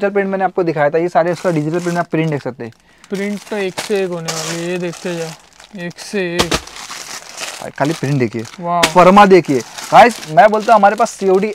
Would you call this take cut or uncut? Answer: uncut